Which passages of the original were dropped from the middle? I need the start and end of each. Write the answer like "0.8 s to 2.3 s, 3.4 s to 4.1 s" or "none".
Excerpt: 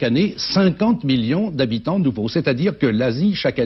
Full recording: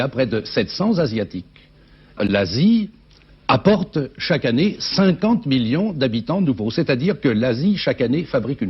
none